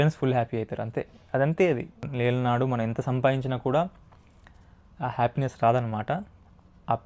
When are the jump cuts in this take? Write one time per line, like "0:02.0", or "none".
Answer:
0:02.0